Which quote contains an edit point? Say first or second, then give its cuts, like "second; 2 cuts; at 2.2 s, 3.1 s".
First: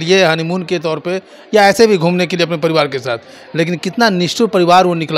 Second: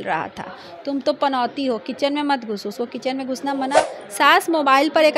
second; 1 cut; at 3.8 s